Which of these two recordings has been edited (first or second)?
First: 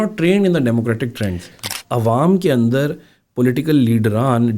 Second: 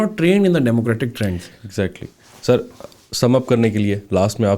first